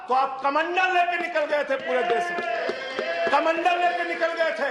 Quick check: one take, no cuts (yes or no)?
yes